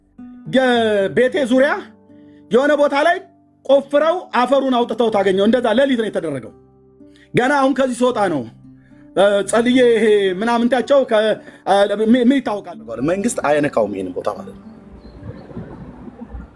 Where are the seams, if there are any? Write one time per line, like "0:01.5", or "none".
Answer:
0:12.7